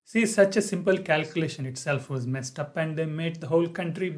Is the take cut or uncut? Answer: uncut